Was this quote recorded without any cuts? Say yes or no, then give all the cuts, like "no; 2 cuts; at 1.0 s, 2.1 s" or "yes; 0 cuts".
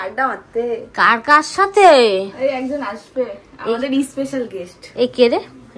yes; 0 cuts